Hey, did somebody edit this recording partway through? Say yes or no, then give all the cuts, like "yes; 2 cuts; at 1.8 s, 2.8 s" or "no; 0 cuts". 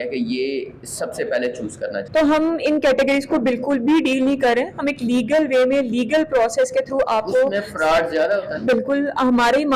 yes; 1 cut; at 2.0 s